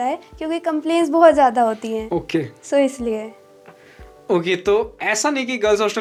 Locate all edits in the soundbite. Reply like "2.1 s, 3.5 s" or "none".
none